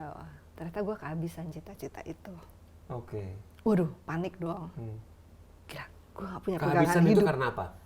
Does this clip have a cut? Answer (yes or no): no